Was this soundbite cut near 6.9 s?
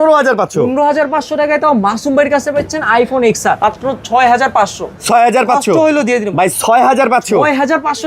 no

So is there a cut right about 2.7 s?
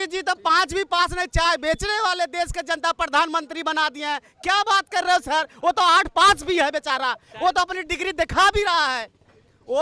no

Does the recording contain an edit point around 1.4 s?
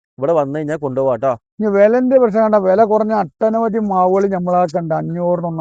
no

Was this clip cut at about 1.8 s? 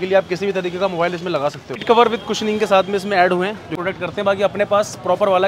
yes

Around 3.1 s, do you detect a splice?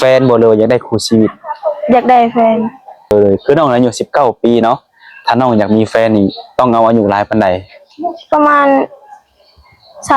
yes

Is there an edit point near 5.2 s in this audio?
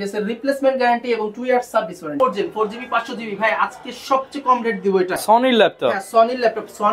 yes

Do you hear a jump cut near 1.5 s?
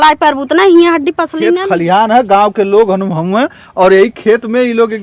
yes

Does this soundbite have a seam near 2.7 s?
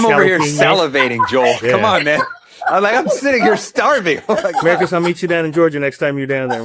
yes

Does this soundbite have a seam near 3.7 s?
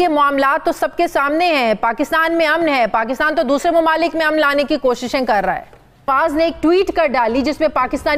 no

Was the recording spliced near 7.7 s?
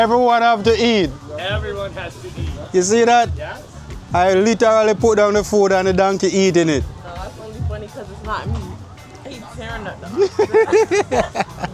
no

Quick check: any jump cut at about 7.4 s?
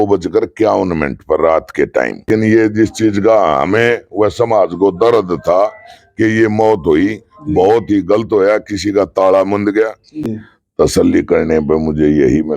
no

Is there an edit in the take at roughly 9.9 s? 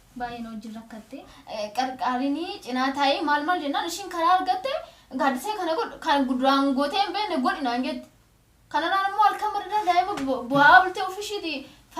no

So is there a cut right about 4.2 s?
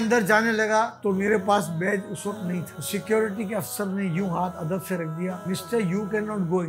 no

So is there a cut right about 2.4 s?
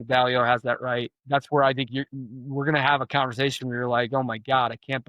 no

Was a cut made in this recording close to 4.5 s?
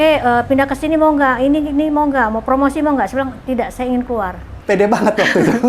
yes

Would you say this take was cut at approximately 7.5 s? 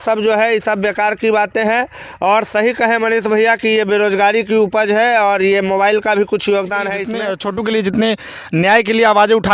yes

